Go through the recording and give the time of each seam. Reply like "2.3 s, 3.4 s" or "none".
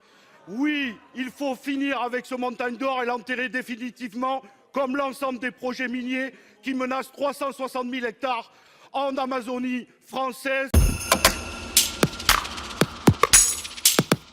10.7 s

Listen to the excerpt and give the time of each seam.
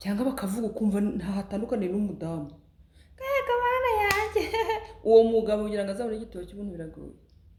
none

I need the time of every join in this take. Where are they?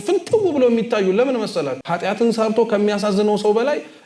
1.9 s

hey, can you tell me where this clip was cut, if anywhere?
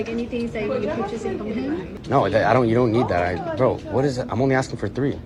1.9 s

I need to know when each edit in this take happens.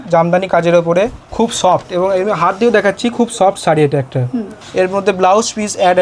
1.2 s, 4.6 s

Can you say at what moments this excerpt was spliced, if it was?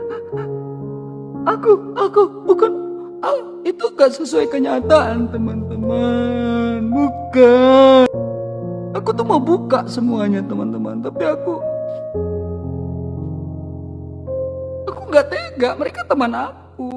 8.1 s

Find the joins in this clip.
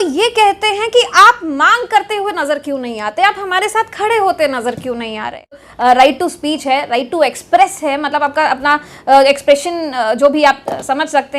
5.7 s

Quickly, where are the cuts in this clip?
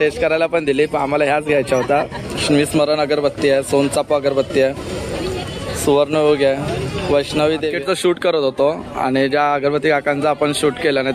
2.3 s, 7.7 s

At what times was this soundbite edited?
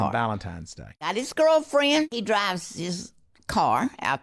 1.1 s, 2.2 s

